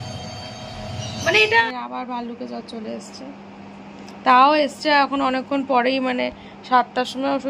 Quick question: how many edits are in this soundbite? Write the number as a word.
one